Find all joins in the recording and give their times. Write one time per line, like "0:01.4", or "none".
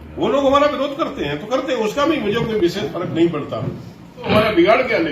0:04.2